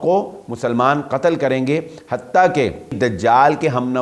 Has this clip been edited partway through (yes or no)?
yes